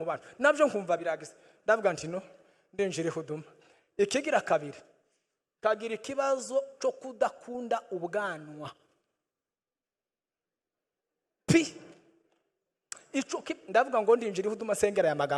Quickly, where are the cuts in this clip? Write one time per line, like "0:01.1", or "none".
none